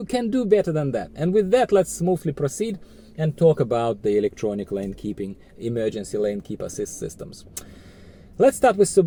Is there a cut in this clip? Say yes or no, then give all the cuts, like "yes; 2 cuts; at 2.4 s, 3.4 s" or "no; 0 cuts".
no; 0 cuts